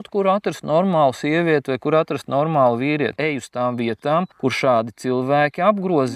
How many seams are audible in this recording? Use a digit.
1